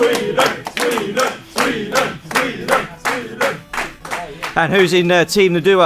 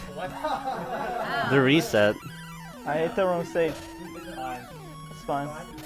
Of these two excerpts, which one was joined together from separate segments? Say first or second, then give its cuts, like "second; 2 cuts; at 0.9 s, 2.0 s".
first; 1 cut; at 3.3 s